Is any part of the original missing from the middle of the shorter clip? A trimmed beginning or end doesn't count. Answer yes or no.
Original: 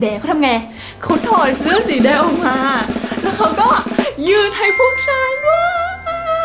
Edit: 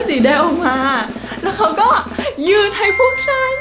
no